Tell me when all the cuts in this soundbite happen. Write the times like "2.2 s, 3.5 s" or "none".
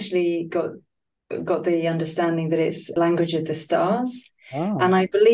2.8 s